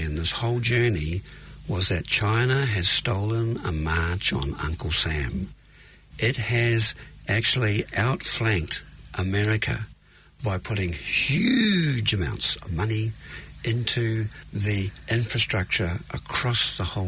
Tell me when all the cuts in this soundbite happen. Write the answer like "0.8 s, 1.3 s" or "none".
none